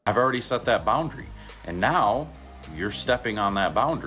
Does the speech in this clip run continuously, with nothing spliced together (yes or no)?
yes